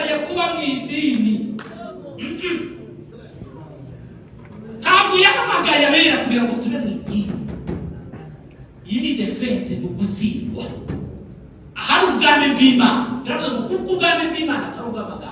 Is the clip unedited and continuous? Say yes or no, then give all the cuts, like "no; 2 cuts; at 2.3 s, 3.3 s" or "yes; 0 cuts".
yes; 0 cuts